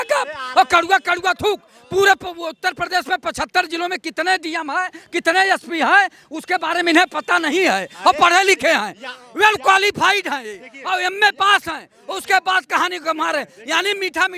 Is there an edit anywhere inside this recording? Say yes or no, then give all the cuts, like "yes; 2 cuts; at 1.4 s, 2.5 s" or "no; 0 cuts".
no; 0 cuts